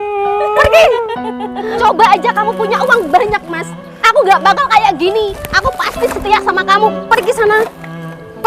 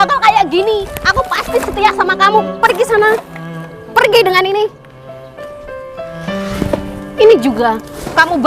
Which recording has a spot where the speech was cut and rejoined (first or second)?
first